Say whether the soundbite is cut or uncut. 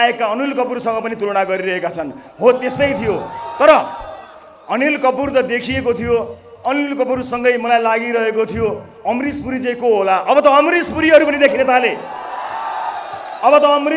uncut